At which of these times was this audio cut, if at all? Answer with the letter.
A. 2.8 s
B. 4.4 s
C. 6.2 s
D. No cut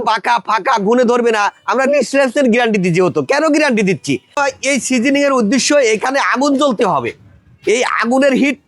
B